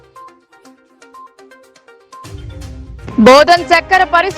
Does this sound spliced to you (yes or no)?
yes